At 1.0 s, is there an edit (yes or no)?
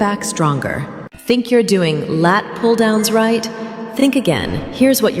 yes